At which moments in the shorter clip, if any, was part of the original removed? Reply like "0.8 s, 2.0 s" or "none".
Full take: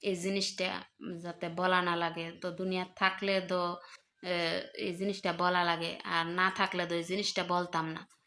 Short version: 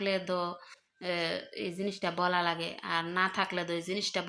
none

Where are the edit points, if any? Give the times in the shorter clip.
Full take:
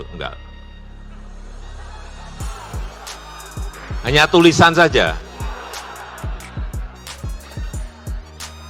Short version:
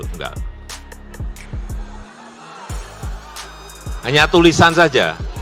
none

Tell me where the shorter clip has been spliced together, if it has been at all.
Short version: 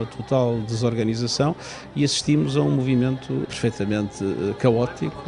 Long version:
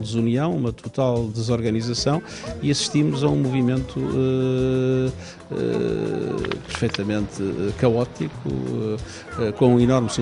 3.4 s

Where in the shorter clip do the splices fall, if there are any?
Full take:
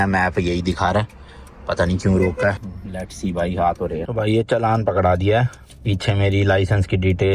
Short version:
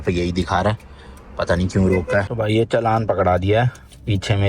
2.3 s

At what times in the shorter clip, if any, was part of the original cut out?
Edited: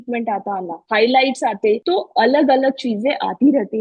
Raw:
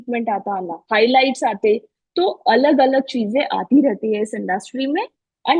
1.8 s

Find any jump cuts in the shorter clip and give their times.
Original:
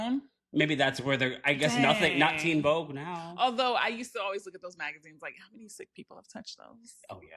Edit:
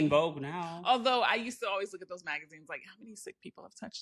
none

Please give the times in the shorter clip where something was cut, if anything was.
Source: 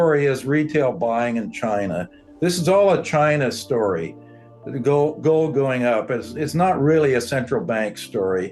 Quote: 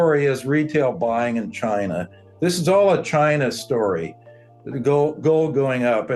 none

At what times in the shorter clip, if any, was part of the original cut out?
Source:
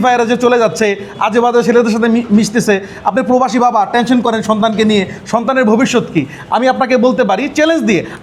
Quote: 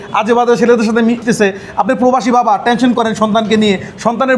1.2 s

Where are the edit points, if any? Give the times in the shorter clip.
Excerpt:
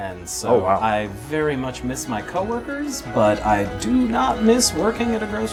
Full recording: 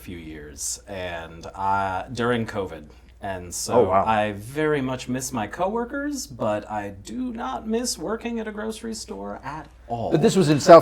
none

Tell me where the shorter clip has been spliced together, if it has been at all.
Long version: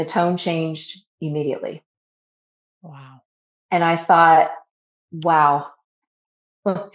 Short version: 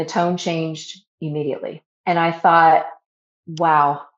1.9 s

